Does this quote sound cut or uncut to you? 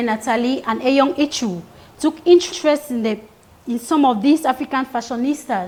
uncut